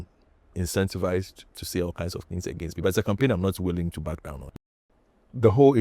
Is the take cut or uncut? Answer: cut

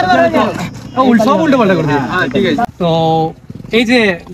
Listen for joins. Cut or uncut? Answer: cut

